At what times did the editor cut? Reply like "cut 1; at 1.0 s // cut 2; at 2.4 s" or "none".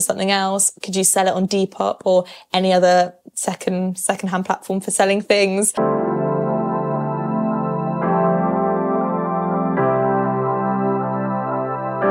cut 1; at 5.7 s